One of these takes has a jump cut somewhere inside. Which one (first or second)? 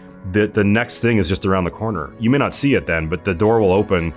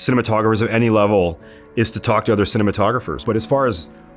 second